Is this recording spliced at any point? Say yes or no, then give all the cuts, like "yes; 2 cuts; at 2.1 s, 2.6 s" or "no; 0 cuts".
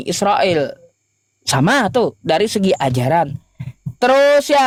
no; 0 cuts